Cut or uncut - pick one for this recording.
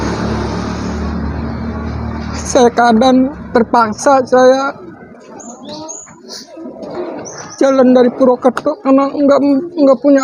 uncut